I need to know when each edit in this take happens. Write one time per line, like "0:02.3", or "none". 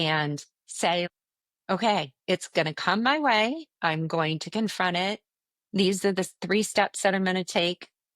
0:01.1